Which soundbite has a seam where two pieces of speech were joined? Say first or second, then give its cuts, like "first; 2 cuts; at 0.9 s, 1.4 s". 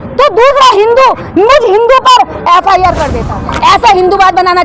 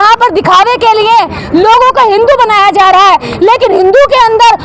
first; 1 cut; at 3.1 s